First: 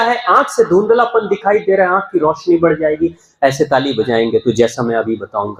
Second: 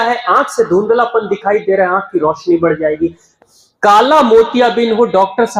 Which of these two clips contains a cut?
second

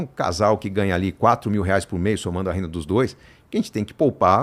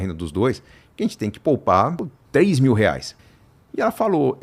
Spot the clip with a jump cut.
second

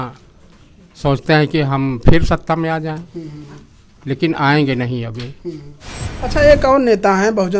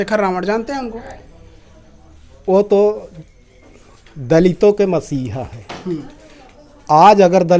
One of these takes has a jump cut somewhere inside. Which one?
first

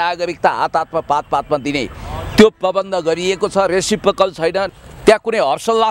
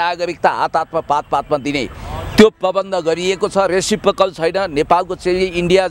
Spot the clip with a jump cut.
first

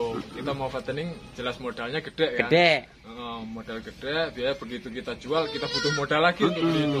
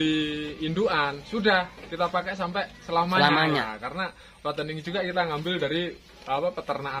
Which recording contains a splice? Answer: second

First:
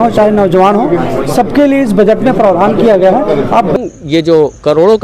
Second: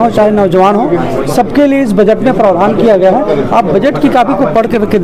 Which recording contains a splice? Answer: first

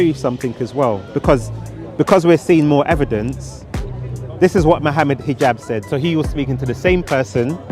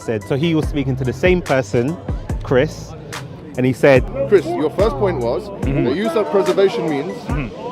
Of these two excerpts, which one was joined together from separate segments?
second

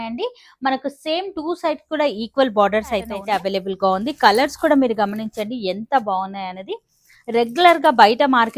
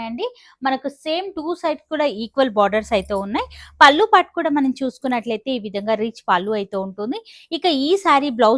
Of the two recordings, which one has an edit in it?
first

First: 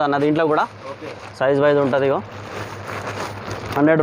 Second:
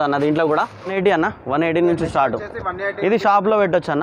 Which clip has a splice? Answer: second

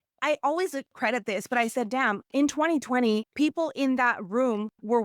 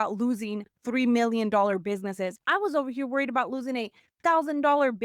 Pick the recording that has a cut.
first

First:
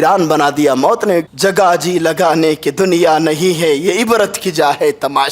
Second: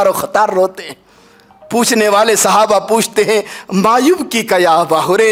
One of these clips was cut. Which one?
first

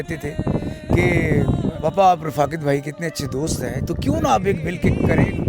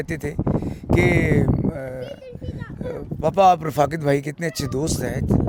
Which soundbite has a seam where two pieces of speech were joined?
first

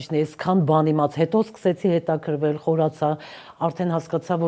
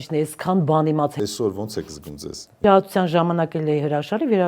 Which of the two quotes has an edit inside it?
second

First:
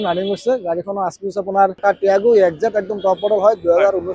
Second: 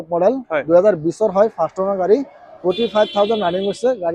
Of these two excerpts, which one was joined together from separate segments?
first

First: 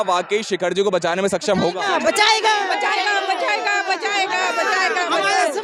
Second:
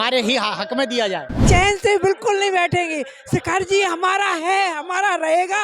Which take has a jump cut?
second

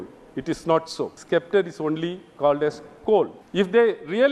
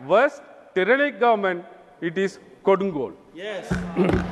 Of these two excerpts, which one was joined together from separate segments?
first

